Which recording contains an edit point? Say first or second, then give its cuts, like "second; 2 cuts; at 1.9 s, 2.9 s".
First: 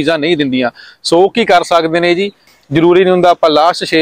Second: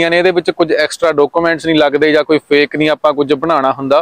first; 1 cut; at 2.4 s